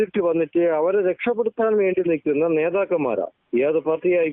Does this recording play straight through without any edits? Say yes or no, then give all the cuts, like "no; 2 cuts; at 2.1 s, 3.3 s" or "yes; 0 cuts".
yes; 0 cuts